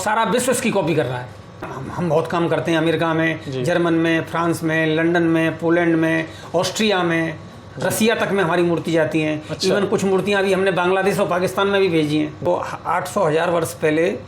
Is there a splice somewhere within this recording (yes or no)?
yes